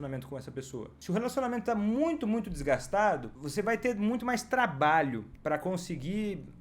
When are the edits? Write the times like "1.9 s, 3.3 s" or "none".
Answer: 0.9 s, 3.4 s, 5.3 s